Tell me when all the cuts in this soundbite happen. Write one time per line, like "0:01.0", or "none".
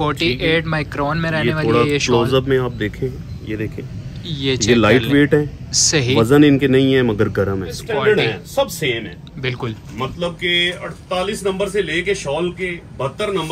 0:07.8